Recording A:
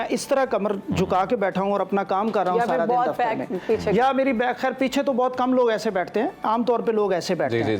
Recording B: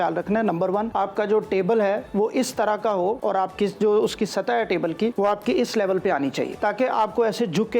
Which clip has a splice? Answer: B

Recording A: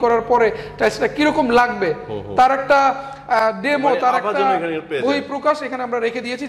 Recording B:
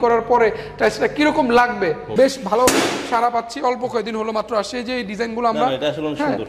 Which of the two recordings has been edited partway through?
B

